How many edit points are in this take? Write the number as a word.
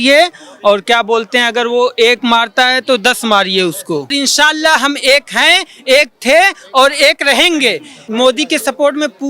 two